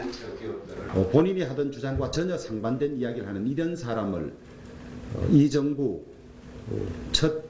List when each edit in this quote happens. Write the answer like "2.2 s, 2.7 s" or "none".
1.6 s